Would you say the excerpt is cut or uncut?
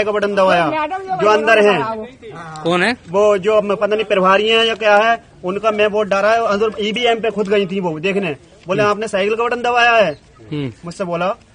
uncut